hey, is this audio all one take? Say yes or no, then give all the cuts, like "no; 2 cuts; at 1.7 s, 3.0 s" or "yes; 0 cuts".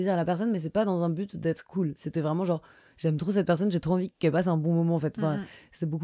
yes; 0 cuts